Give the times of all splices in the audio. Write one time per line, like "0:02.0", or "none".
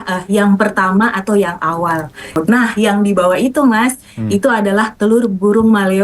0:02.4